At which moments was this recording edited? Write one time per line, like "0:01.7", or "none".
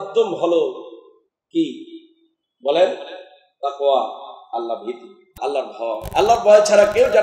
0:05.3